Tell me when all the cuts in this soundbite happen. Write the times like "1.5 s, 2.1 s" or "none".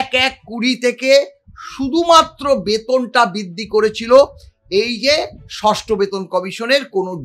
none